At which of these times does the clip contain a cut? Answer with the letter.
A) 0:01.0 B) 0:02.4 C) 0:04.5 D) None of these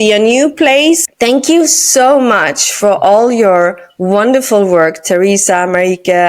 A